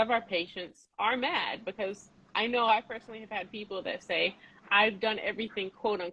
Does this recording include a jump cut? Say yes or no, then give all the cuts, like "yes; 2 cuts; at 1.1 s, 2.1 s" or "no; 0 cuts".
no; 0 cuts